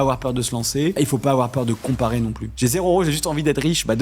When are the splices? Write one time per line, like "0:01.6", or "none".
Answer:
0:01.0
0:02.4